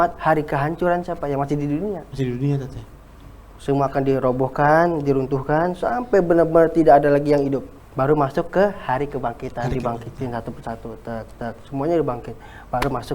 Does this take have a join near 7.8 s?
yes; 1 cut; at 7.8 s

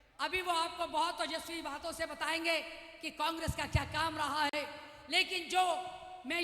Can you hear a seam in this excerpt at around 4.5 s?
yes; 1 cut; at 4.5 s

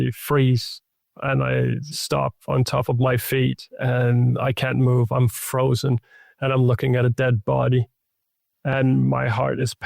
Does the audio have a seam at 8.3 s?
no; 1 cut; at 1.8 s

